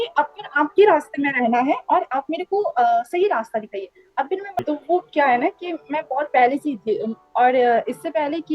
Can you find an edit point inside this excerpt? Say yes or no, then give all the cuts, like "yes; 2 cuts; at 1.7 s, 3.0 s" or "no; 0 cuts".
yes; 1 cut; at 4.6 s